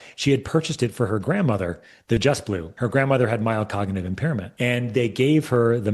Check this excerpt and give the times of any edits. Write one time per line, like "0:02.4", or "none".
0:02.7
0:04.5